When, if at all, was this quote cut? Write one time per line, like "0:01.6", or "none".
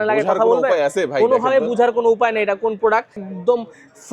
0:03.2